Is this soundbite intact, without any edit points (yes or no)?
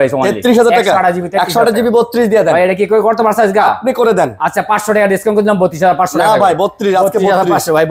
yes